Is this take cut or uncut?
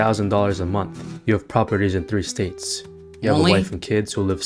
uncut